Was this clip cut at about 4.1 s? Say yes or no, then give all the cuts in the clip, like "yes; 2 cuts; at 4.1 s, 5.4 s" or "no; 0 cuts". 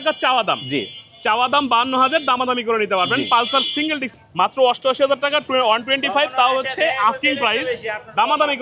yes; 1 cut; at 4.1 s